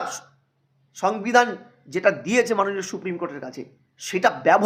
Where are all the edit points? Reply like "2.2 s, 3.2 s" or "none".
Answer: none